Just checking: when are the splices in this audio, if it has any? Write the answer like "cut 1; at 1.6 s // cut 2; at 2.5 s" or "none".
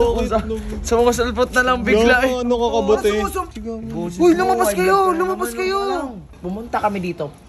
cut 1; at 3.4 s // cut 2; at 6.3 s